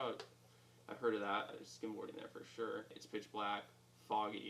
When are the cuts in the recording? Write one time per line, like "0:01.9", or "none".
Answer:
0:01.6
0:03.0